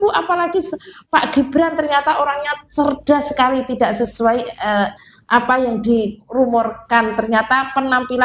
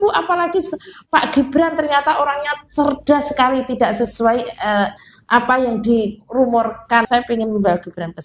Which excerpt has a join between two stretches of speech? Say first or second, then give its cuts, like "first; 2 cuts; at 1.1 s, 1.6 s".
second; 1 cut; at 7.1 s